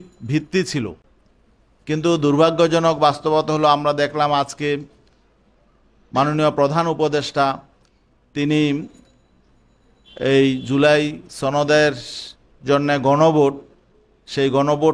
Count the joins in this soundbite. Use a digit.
0